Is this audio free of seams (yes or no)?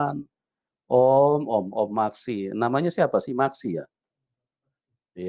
yes